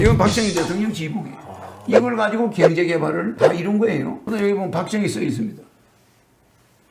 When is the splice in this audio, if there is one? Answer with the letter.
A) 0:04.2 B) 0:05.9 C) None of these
A